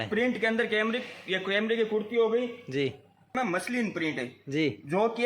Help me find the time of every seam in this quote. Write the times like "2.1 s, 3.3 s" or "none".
3.3 s